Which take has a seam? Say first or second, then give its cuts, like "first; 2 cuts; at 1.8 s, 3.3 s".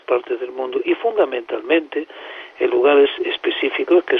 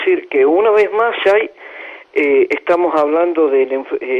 first; 1 cut; at 1.5 s